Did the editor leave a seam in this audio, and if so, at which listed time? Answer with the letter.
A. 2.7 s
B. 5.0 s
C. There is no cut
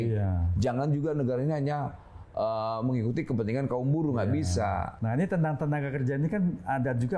B